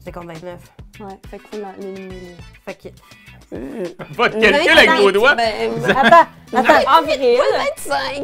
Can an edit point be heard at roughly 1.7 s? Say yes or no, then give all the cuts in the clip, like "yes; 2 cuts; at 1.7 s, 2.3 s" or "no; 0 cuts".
no; 0 cuts